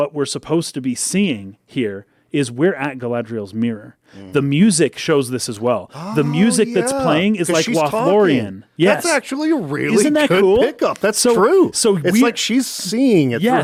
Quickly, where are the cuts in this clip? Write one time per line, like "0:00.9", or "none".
none